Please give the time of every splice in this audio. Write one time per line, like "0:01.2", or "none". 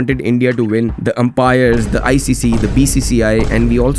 0:01.0